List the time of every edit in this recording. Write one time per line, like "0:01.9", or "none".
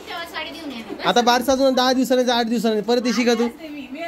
none